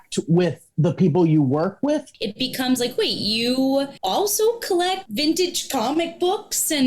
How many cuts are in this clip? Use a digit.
3